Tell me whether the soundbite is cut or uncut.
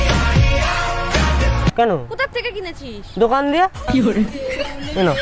cut